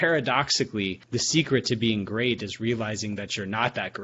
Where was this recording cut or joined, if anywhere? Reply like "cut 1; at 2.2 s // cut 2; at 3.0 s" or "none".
cut 1; at 1.0 s